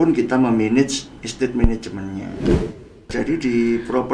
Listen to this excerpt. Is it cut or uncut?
cut